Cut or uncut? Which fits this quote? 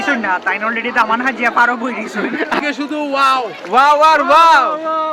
cut